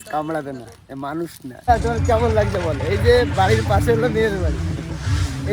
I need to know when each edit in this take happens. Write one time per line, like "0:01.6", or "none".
0:01.7